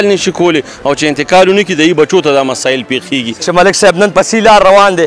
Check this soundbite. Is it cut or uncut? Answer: cut